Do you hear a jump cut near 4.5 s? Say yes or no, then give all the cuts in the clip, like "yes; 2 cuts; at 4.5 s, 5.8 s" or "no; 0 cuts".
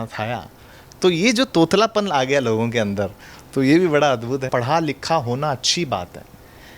yes; 1 cut; at 4.5 s